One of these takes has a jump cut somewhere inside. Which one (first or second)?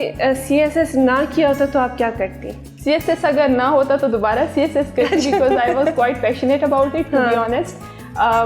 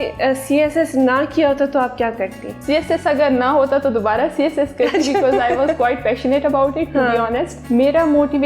second